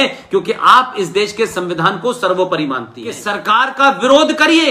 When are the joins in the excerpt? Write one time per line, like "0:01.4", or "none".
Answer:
0:03.3